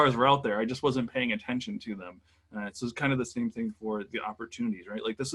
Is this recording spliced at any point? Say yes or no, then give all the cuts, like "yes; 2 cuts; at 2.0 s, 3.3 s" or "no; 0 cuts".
no; 0 cuts